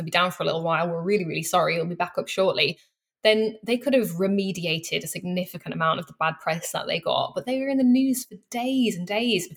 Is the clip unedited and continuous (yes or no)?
yes